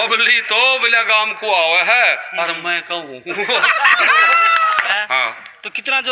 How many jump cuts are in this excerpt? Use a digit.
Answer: 1